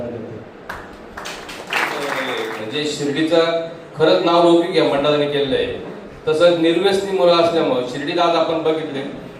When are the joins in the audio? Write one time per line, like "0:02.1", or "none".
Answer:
0:02.1